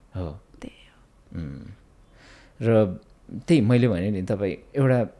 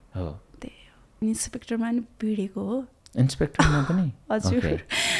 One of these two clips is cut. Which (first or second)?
second